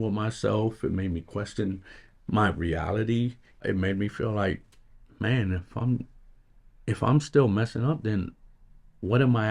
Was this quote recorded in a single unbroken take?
no; 1 cut; at 3.6 s

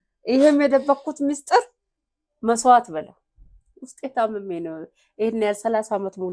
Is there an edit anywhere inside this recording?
no; 0 cuts

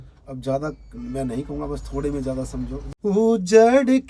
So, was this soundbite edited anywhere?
yes; 1 cut; at 2.8 s

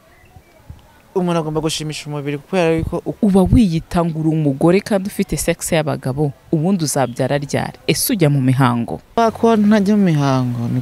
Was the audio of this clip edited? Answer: yes; 2 cuts; at 3.2 s, 9.2 s

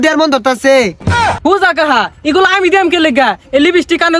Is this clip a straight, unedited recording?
yes; 0 cuts

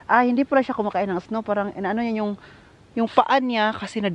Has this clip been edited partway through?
no; 0 cuts

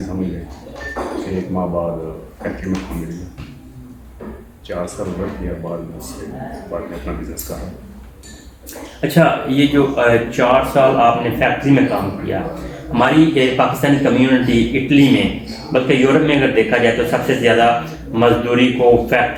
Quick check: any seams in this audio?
no; 0 cuts

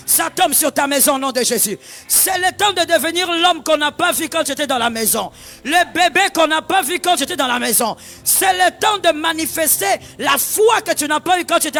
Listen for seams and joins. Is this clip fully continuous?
yes; 0 cuts

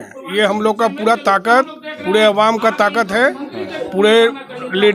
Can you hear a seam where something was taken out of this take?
no; 0 cuts

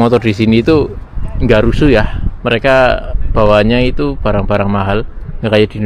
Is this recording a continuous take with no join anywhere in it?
yes; 0 cuts

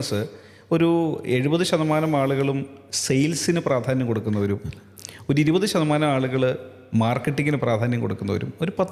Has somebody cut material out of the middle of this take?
no; 0 cuts

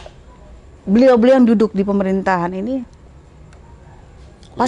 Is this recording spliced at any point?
no; 0 cuts

